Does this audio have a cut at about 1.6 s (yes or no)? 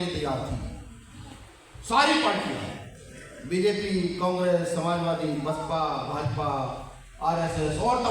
no